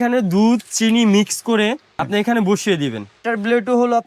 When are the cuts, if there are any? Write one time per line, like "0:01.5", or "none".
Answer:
0:01.9
0:03.2